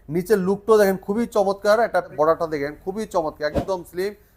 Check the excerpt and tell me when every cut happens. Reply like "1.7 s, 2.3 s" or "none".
2.1 s